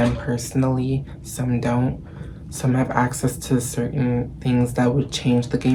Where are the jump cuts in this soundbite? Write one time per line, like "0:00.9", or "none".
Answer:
none